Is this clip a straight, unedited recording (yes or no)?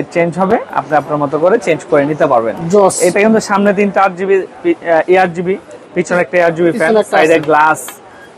yes